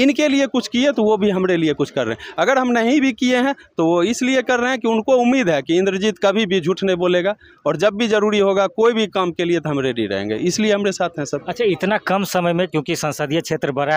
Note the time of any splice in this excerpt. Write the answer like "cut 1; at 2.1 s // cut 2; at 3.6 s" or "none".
none